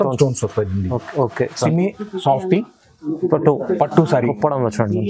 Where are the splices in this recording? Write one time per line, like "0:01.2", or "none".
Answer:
0:01.6